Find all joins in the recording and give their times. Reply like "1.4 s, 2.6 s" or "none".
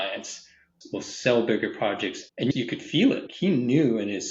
2.5 s, 3.3 s